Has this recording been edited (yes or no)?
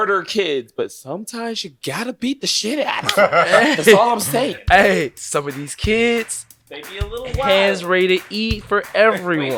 no